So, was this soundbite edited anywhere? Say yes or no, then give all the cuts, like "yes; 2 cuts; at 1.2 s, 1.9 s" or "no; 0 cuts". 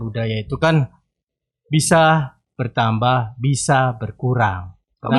no; 0 cuts